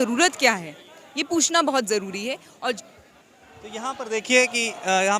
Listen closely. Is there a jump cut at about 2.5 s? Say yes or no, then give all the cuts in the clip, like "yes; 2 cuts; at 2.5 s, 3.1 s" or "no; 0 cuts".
yes; 1 cut; at 2.5 s